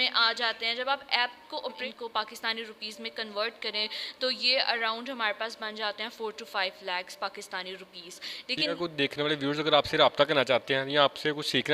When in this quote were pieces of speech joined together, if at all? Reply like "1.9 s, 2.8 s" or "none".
1.8 s, 8.7 s